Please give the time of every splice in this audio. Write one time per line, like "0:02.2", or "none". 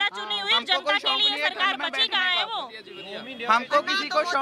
none